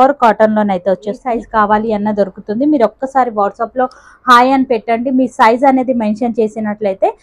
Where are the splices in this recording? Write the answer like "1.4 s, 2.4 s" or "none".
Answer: 1.3 s